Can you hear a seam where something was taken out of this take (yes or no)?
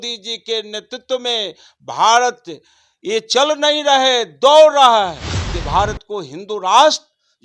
yes